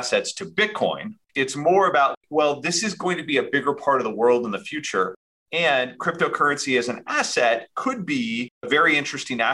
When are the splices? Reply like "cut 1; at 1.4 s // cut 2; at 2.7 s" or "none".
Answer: cut 1; at 1.1 s // cut 2; at 2.1 s